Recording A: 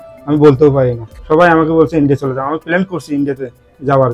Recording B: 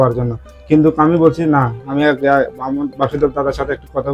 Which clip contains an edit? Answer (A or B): A